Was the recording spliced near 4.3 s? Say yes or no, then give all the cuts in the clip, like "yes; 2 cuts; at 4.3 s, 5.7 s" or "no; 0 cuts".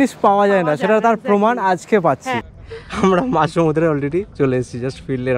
no; 1 cut; at 2.4 s